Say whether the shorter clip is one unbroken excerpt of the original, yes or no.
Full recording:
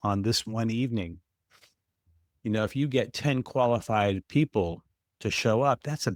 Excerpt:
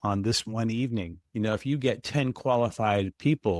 no